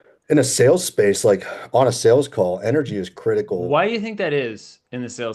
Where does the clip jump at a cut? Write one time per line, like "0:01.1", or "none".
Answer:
0:03.7